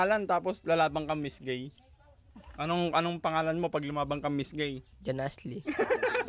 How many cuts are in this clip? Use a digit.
1